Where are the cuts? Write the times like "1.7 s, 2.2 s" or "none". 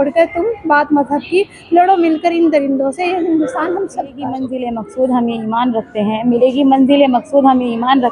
4.5 s

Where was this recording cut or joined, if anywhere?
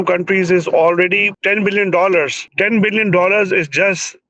1.3 s, 2.4 s

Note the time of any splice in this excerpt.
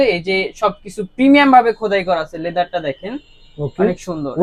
none

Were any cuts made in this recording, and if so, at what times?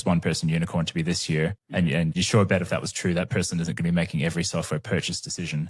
2.2 s

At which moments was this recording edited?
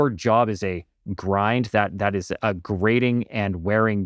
none

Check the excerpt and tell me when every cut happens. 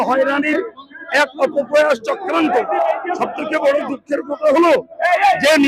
none

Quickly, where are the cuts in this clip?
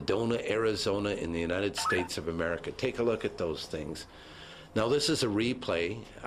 1.1 s

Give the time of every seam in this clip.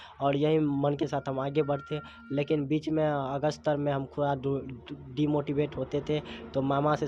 none

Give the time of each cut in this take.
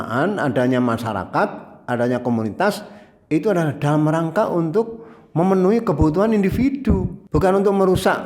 7.2 s

